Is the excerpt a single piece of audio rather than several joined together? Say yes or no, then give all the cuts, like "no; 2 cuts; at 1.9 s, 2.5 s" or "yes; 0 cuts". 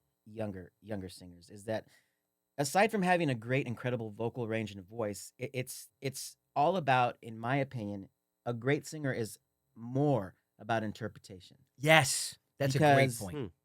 no; 1 cut; at 5.8 s